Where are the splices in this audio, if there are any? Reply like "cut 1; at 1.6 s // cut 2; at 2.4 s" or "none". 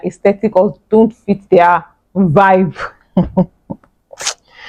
none

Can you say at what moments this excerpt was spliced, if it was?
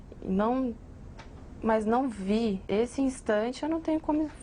cut 1; at 2.6 s

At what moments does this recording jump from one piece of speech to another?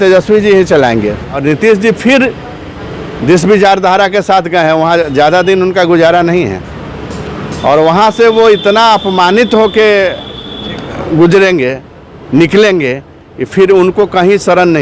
cut 1; at 1.4 s

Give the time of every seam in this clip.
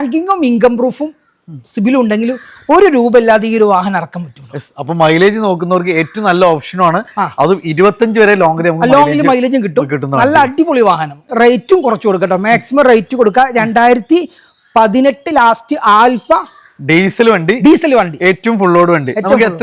cut 1; at 11.2 s

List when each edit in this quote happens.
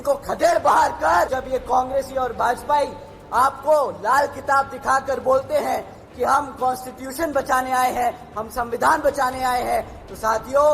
cut 1; at 1.3 s

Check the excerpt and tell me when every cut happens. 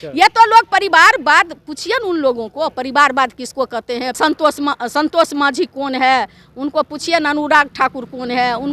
cut 1; at 4.2 s

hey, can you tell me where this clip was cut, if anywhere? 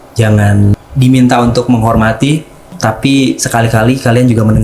cut 1; at 0.7 s // cut 2; at 2.7 s

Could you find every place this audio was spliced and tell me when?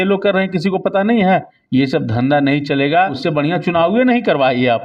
cut 1; at 1.6 s // cut 2; at 3.2 s

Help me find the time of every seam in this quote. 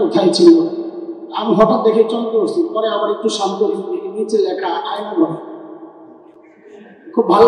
none

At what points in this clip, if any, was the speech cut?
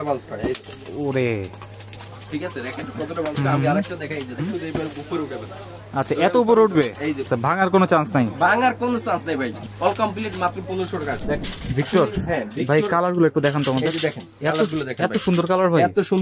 cut 1; at 4.4 s // cut 2; at 7.3 s // cut 3; at 9.6 s // cut 4; at 11.2 s

